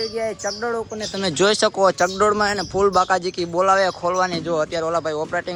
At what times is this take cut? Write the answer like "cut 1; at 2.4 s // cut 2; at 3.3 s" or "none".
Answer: none